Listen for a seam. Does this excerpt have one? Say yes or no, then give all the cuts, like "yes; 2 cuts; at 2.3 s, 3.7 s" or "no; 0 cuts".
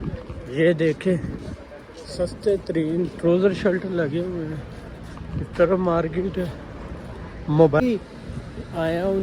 yes; 1 cut; at 7.8 s